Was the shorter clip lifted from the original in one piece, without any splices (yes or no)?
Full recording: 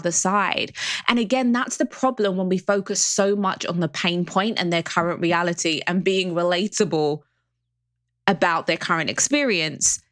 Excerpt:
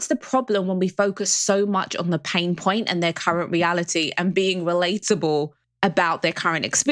no